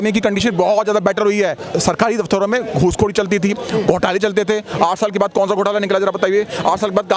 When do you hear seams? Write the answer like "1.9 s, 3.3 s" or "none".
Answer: 1.6 s